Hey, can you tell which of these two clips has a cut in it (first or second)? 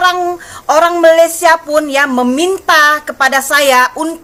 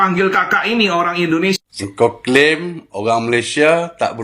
second